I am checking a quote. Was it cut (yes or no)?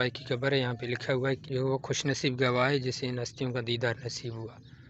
yes